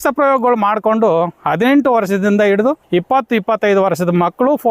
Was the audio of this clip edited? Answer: yes; 1 cut; at 2.8 s

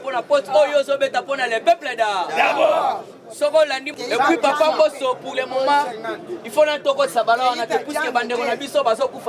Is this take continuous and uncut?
no; 1 cut; at 3.9 s

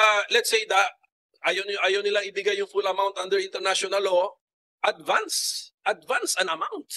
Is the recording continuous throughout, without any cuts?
yes; 0 cuts

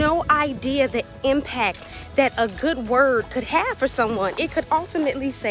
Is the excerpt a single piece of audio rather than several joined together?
yes; 0 cuts

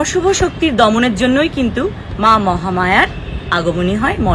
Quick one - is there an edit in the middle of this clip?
no; 0 cuts

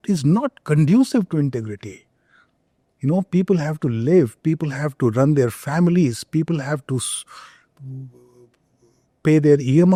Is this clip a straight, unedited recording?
yes; 0 cuts

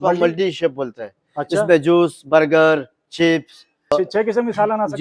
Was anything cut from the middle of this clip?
yes; 1 cut; at 3.9 s

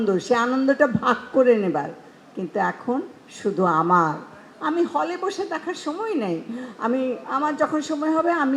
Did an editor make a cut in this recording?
no; 0 cuts

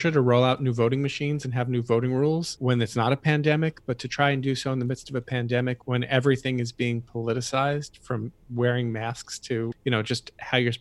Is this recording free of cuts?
no; 4 cuts; at 2.5 s, 5.8 s, 8.4 s, 9.8 s

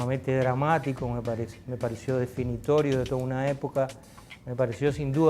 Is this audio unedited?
yes; 0 cuts

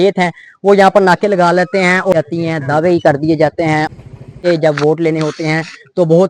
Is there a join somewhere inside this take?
yes; 2 cuts; at 2.1 s, 3.9 s

